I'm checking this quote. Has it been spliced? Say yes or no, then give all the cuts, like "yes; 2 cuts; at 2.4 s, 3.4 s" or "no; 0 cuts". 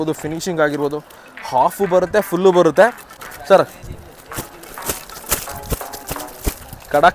yes; 1 cut; at 3.3 s